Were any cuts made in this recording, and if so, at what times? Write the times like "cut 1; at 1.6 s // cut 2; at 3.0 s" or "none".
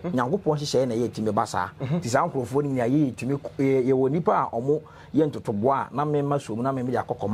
none